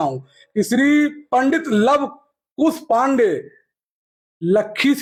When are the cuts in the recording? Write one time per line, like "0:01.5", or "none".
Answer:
none